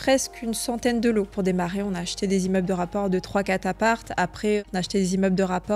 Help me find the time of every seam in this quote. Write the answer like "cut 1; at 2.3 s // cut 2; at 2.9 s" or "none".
cut 1; at 1.3 s // cut 2; at 4.7 s